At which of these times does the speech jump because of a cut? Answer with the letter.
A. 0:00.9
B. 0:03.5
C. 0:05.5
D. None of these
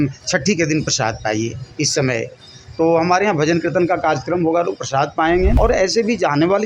C